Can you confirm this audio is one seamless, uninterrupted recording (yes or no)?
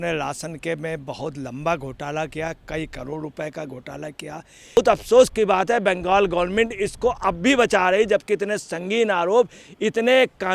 no